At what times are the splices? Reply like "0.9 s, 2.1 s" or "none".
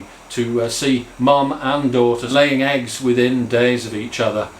2.2 s

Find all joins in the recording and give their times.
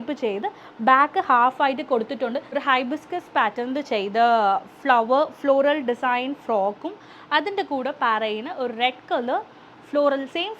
2.4 s

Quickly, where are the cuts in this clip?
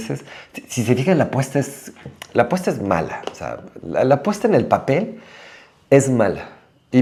none

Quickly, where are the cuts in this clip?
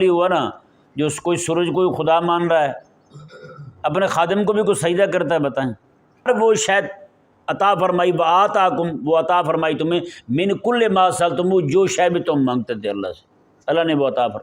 6.3 s

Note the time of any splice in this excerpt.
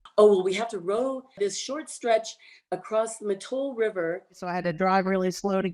1.4 s, 4.5 s

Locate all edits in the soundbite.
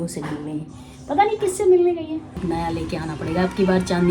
2.4 s

